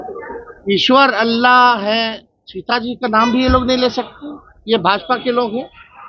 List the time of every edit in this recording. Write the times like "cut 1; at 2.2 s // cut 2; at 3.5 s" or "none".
none